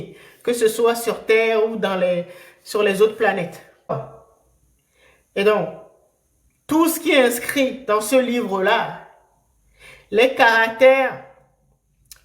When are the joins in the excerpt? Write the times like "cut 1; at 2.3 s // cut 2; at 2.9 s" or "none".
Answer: cut 1; at 3.9 s